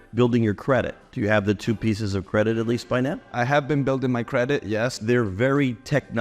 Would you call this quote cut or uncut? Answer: cut